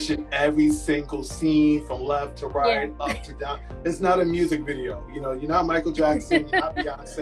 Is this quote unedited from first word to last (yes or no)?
yes